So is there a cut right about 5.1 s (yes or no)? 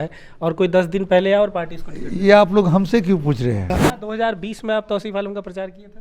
no